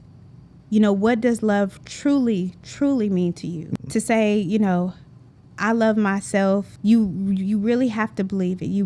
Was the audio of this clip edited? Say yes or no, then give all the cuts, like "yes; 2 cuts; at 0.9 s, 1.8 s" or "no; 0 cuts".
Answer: yes; 2 cuts; at 3.6 s, 6.7 s